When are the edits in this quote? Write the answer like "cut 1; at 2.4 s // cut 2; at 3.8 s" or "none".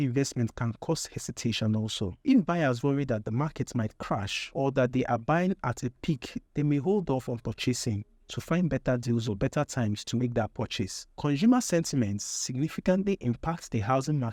none